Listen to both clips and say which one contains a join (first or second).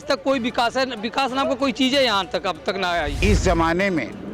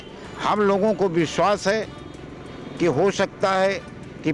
first